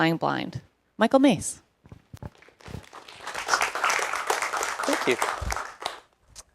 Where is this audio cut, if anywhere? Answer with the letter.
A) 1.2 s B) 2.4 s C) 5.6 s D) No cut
C